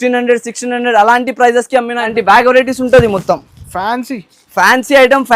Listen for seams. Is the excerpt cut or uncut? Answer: cut